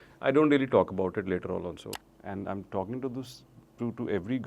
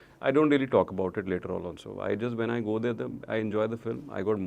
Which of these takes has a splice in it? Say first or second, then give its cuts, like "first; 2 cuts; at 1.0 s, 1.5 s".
first; 1 cut; at 1.8 s